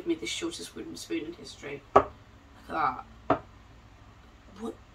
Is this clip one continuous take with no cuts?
yes; 0 cuts

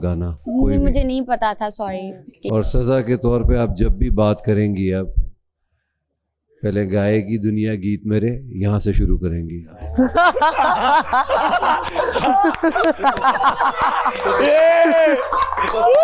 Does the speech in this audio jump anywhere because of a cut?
no; 0 cuts

